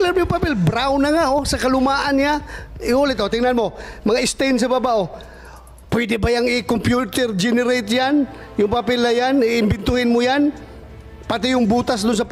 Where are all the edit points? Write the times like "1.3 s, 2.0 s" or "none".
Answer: none